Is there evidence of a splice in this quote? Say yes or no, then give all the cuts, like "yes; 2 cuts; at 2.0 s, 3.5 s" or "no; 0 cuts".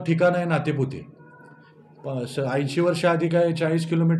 no; 0 cuts